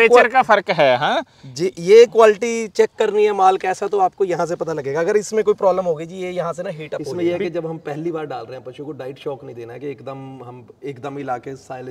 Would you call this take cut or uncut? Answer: cut